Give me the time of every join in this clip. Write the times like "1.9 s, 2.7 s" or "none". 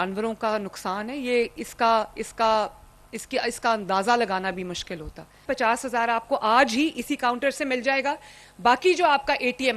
5.4 s